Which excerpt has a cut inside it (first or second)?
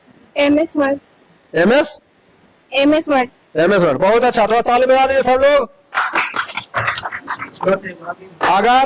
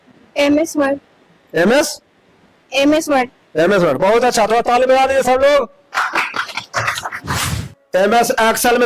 second